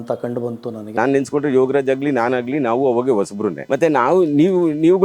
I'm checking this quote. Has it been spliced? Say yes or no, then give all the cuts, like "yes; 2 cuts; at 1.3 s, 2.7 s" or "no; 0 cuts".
yes; 1 cut; at 0.9 s